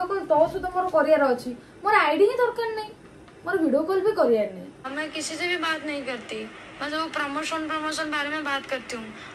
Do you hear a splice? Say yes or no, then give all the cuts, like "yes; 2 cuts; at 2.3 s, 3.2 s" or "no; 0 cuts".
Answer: no; 0 cuts